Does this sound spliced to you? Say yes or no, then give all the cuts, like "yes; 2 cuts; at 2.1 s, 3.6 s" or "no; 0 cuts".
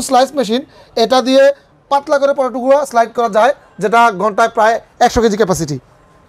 no; 0 cuts